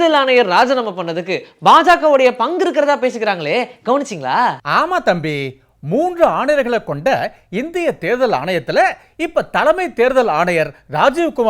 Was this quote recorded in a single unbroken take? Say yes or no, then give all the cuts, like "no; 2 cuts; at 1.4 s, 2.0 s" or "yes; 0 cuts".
yes; 0 cuts